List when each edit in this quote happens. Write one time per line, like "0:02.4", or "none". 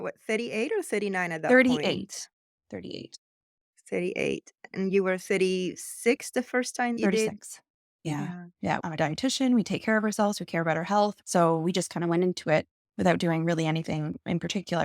0:07.0
0:08.8
0:11.1